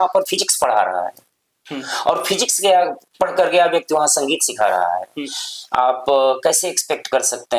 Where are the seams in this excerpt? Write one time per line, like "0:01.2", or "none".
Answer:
none